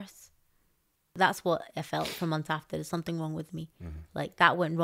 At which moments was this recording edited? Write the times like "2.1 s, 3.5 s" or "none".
1.1 s